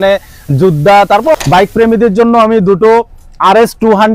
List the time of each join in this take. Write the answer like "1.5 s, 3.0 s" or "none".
1.3 s